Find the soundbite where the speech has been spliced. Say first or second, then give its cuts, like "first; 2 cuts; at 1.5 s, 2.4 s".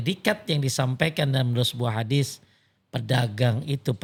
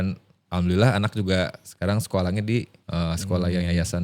second; 1 cut; at 2.8 s